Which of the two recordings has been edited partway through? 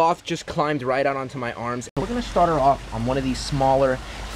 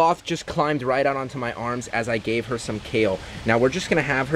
first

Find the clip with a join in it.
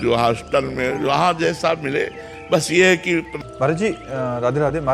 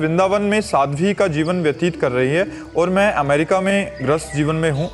first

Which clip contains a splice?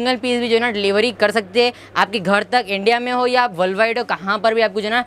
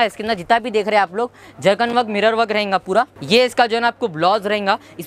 second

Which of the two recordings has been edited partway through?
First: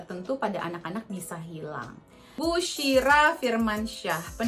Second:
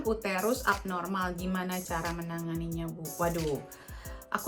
first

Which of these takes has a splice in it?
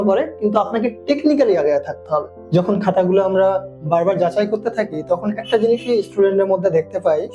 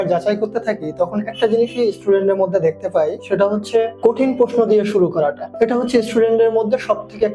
first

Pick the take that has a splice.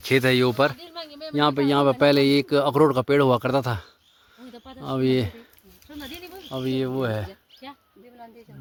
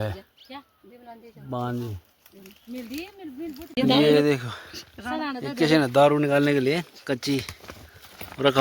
second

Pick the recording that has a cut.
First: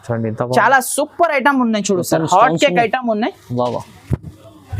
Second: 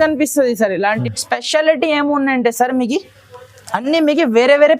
second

